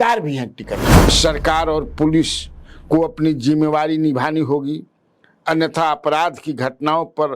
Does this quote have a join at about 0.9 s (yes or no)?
yes